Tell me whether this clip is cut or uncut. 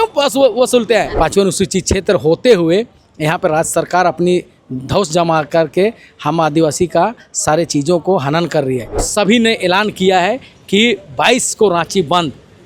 cut